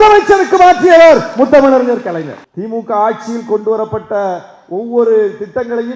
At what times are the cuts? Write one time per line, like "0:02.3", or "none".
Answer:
0:02.4